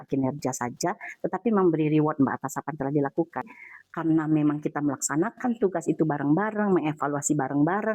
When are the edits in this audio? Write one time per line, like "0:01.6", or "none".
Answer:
0:03.5